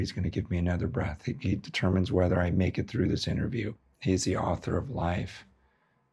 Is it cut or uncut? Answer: cut